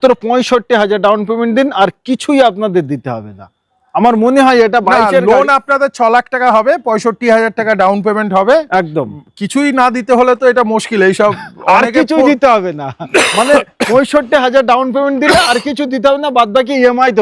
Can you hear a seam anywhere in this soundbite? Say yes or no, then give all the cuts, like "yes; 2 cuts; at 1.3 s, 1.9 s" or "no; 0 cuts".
no; 0 cuts